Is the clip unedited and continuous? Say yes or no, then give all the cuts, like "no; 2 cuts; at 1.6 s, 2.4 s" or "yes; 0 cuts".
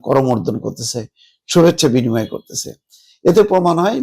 yes; 0 cuts